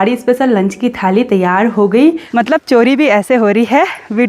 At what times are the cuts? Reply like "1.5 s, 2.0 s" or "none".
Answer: 2.2 s